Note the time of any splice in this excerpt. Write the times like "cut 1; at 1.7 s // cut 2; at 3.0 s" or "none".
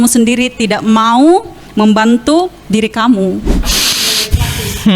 cut 1; at 3.7 s